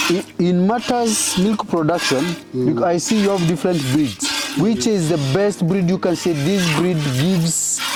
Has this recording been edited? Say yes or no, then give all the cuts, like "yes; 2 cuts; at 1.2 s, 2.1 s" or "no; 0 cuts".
no; 0 cuts